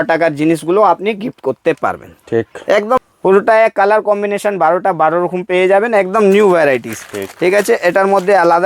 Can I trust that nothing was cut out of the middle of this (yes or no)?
no